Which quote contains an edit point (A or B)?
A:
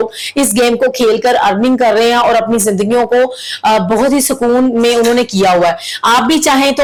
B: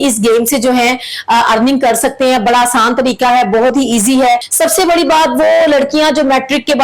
B